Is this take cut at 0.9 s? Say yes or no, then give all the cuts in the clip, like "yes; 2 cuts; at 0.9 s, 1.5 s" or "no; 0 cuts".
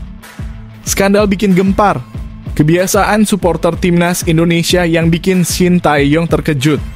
yes; 1 cut; at 0.9 s